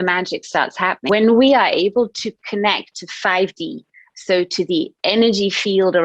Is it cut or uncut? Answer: cut